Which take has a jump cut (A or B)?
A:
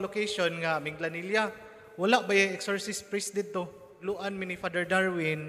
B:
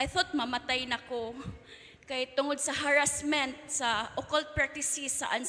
A